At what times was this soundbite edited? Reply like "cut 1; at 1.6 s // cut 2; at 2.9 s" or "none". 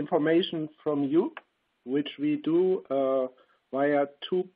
cut 1; at 2.5 s